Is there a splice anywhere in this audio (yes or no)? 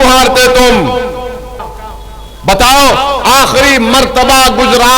yes